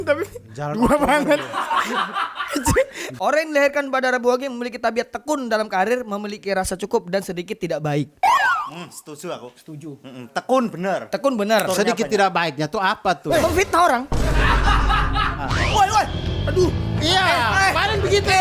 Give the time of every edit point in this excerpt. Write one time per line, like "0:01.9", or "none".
0:03.0
0:15.4